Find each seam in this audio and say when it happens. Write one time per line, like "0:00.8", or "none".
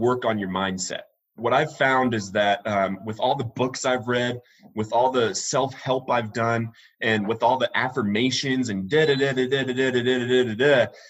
0:01.3